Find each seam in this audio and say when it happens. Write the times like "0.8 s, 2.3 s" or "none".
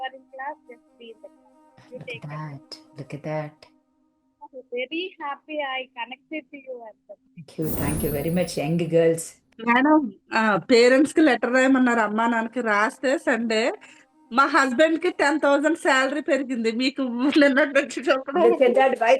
9.4 s